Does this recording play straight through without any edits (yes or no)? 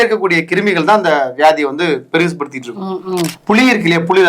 no